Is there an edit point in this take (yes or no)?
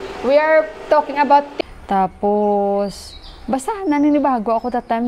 yes